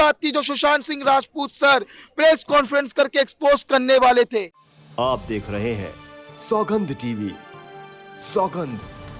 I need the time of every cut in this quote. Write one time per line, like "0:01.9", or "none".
0:04.6